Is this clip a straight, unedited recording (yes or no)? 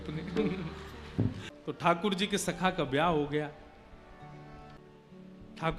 no